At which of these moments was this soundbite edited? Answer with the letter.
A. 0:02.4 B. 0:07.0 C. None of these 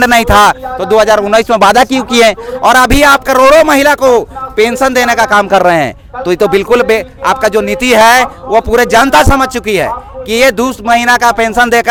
C